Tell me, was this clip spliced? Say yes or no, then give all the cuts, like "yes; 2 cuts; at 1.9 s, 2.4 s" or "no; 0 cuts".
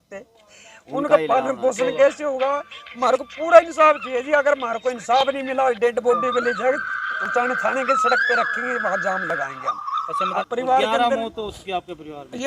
yes; 1 cut; at 10.4 s